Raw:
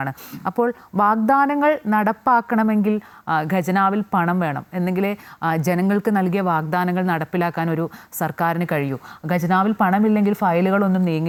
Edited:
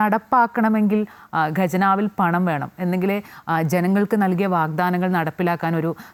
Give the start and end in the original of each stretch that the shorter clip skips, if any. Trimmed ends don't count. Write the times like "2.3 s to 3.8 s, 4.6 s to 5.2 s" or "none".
none